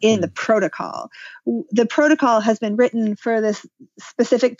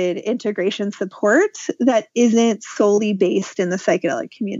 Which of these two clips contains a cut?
first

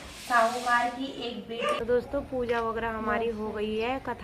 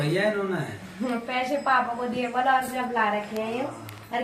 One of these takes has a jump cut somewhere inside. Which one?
first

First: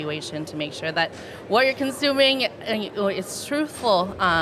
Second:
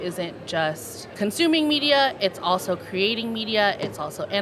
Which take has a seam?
second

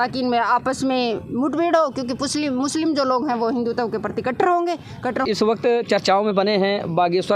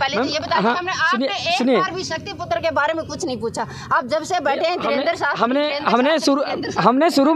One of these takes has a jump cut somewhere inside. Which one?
first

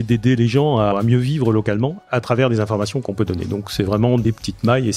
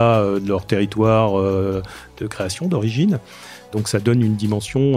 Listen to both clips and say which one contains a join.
first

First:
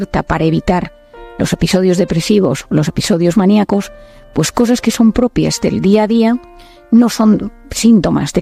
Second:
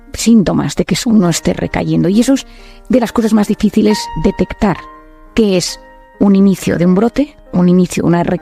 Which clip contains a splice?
second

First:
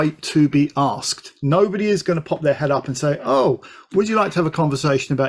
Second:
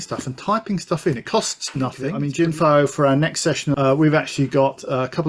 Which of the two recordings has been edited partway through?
second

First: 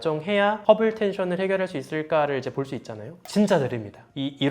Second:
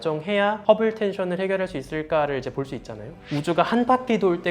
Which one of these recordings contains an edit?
second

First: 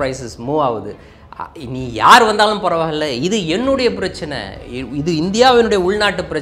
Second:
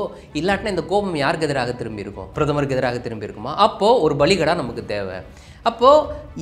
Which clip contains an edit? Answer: second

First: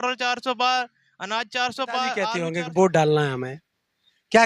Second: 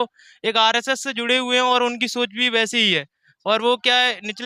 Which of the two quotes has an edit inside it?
first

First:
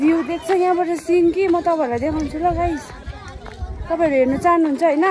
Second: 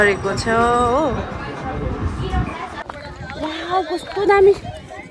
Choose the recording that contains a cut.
second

